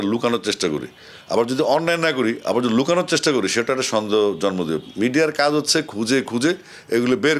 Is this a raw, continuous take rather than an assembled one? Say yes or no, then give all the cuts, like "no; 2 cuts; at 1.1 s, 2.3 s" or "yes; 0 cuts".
yes; 0 cuts